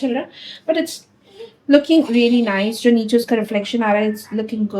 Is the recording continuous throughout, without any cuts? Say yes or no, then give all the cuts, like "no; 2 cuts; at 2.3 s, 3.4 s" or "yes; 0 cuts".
yes; 0 cuts